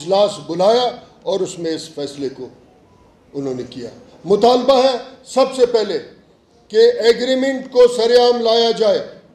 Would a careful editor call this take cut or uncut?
uncut